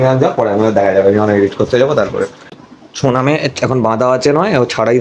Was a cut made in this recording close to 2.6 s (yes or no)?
yes